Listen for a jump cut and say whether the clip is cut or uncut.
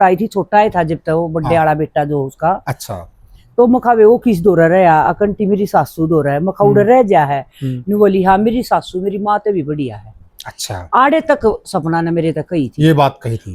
uncut